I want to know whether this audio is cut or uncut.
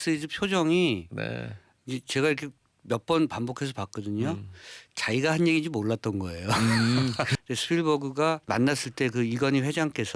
cut